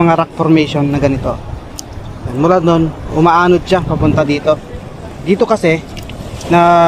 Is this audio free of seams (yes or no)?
yes